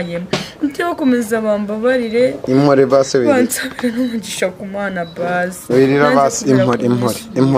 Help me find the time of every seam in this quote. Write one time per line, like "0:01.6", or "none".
none